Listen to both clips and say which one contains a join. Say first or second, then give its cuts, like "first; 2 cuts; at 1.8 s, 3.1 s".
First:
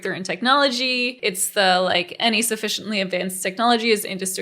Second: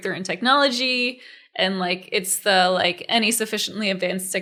first; 1 cut; at 1.2 s